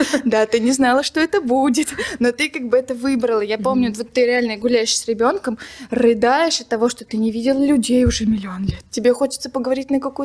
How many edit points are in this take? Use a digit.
0